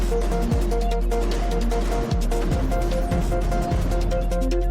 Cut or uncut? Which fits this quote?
cut